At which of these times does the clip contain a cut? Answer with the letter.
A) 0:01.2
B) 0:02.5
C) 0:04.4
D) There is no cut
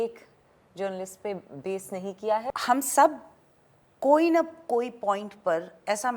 B